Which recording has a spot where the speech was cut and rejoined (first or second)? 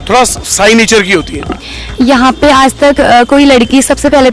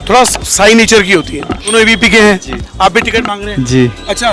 second